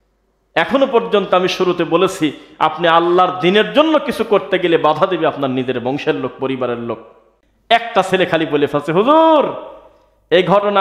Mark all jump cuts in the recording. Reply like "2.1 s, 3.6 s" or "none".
7.5 s